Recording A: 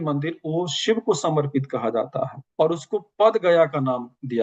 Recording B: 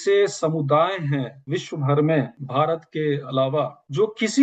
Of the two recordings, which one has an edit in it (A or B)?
B